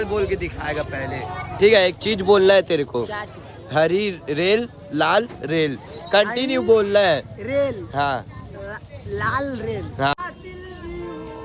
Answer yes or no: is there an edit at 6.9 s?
no